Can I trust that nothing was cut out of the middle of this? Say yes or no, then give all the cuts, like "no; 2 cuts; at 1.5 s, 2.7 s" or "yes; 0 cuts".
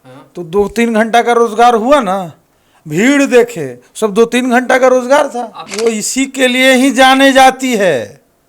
no; 1 cut; at 5.6 s